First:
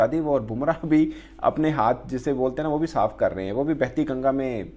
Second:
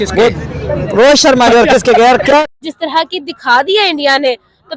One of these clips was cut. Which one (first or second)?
second